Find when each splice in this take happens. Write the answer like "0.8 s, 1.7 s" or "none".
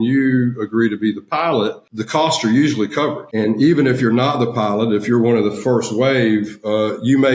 1.9 s, 3.2 s